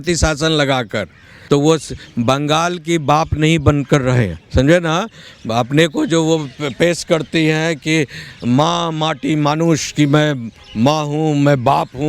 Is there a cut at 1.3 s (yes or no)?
yes